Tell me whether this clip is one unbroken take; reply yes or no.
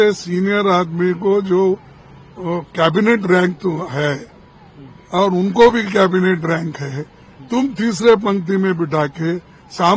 yes